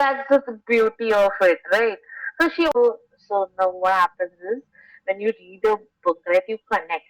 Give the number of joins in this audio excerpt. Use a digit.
1